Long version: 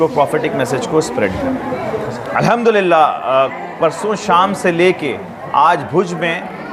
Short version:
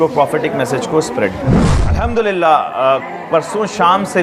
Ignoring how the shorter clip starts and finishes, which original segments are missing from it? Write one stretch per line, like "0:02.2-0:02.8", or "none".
0:01.7-0:02.2